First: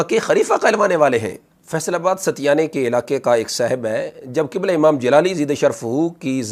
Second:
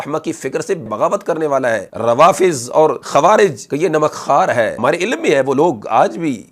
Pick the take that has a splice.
second; 5 cuts; at 0.8 s, 1.9 s, 3.0 s, 3.6 s, 4.7 s

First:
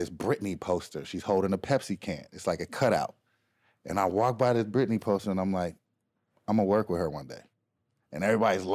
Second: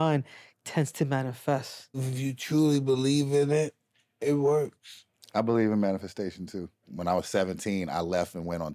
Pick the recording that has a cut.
second; 2 cuts; at 2.1 s, 6.9 s

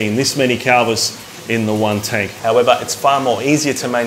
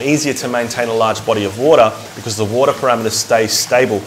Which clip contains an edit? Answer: first; 1 cut; at 2.3 s

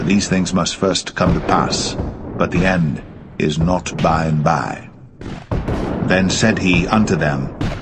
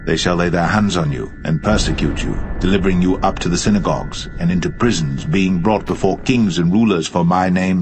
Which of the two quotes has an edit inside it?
first; 1 cut; at 4.4 s

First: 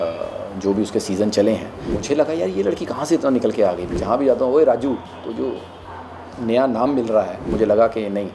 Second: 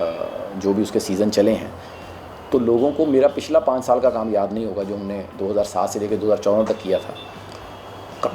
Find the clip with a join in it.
first; 3 cuts; at 2.0 s, 3.9 s, 7.5 s

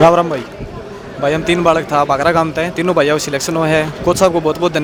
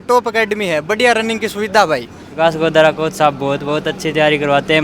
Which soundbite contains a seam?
second; 1 cut; at 2.2 s

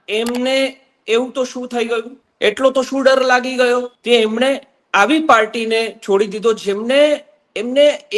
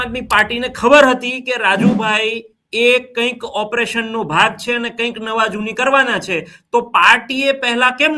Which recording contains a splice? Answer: first; 2 cuts; at 2.2 s, 3.9 s

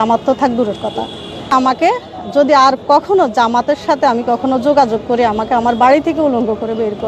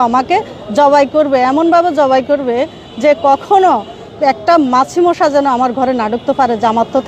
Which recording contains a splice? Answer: first; 1 cut; at 1.4 s

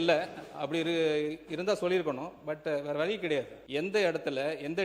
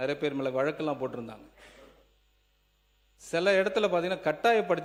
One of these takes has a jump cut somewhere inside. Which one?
first; 1 cut; at 3.6 s

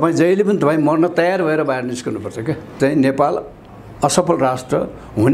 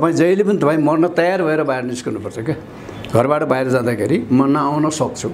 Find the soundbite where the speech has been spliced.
first; 1 cut; at 2.8 s

